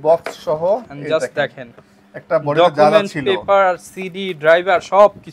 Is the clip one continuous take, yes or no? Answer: yes